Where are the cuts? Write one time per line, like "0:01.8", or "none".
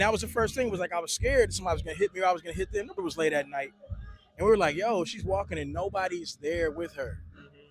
0:03.0